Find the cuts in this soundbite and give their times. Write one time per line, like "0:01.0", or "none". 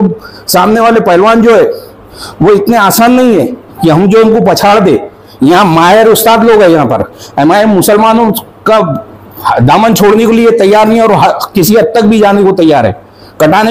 none